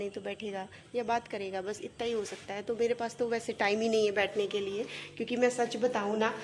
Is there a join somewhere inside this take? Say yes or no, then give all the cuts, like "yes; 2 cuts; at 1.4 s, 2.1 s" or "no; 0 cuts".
no; 0 cuts